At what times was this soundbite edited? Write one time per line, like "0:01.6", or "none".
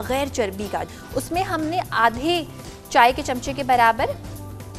0:00.9